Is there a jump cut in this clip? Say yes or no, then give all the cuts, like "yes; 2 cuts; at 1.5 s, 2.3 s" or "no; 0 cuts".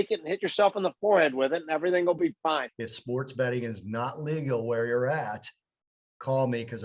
yes; 1 cut; at 2.8 s